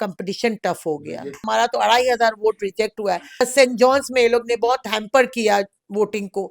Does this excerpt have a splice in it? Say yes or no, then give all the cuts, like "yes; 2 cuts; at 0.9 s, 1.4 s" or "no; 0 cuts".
yes; 2 cuts; at 1.4 s, 3.4 s